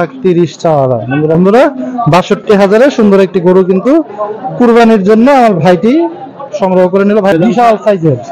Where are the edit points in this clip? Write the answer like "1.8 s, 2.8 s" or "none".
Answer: 1.4 s, 7.3 s